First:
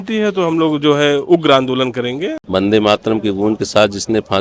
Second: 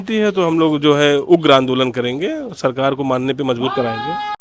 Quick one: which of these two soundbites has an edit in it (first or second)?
first